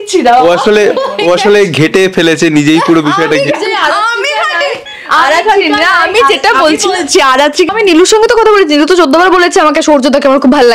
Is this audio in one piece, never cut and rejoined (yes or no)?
no